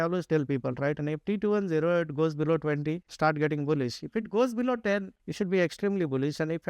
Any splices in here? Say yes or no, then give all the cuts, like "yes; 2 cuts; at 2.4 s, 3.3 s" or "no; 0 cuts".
yes; 2 cuts; at 3.1 s, 5.2 s